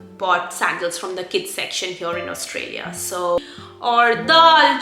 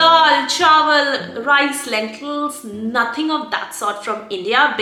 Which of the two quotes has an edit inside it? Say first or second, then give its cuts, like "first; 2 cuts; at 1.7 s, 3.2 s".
first; 1 cut; at 3.4 s